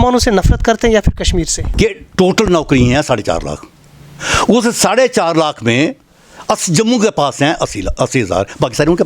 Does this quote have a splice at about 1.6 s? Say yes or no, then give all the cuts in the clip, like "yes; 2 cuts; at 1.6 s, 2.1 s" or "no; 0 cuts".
yes; 1 cut; at 1.6 s